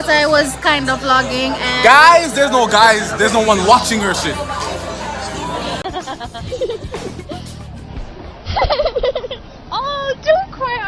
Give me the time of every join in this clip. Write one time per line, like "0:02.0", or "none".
none